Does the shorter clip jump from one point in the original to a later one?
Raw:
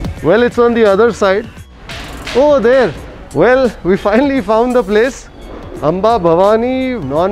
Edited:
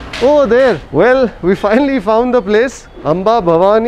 yes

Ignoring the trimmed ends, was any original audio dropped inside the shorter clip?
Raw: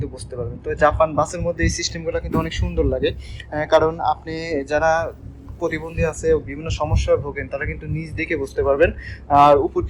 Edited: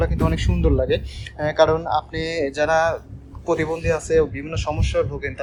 no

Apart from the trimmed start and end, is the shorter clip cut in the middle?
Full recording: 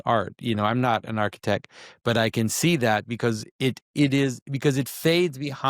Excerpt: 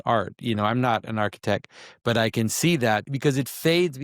yes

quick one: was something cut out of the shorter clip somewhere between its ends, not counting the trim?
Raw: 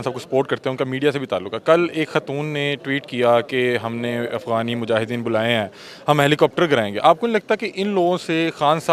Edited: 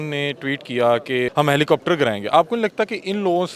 yes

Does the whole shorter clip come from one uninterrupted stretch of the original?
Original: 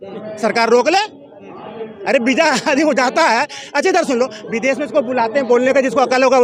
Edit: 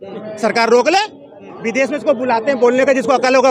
no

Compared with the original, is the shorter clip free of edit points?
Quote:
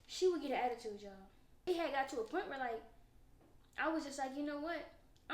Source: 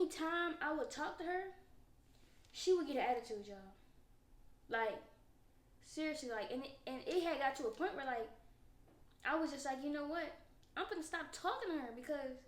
no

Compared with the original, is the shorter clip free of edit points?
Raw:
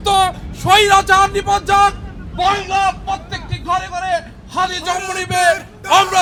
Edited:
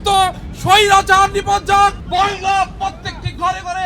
no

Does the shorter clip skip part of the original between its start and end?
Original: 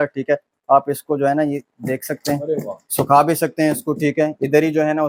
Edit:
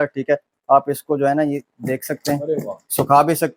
no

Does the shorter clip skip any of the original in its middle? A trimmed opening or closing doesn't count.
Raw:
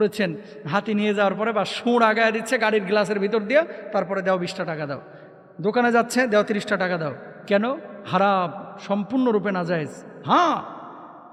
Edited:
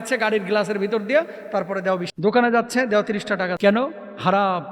yes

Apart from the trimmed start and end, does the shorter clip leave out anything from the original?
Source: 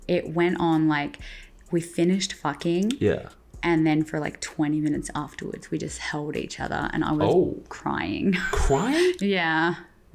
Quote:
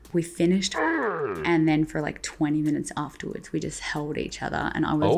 yes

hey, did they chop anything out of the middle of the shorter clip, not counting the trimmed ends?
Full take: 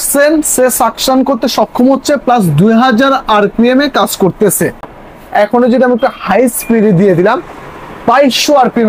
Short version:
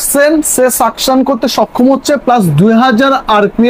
no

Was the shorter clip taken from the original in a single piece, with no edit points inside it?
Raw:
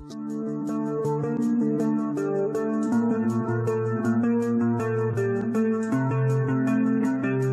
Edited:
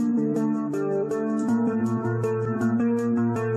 yes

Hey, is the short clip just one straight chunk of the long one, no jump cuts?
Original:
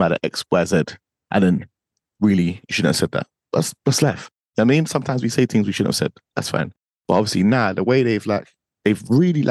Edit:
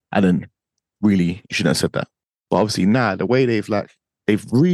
no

